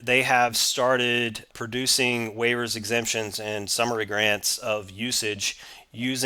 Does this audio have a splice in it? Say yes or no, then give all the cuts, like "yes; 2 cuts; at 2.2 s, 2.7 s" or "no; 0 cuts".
no; 0 cuts